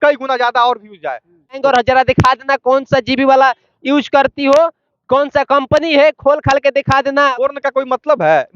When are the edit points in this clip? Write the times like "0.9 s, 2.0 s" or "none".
1.5 s, 7.3 s